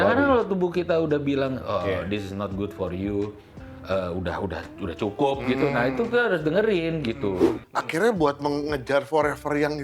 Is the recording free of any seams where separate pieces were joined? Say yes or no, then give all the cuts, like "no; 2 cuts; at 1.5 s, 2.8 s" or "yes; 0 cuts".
no; 2 cuts; at 3.5 s, 7.6 s